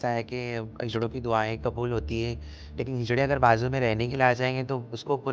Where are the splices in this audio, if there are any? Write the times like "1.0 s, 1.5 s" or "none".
none

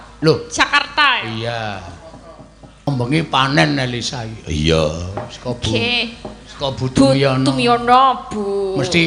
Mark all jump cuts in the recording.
2.9 s

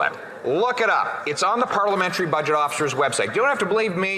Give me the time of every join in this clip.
none

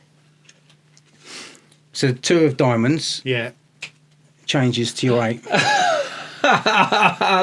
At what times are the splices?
none

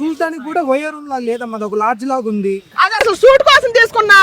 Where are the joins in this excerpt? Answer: 2.7 s

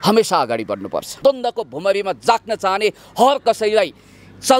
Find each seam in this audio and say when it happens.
1.2 s

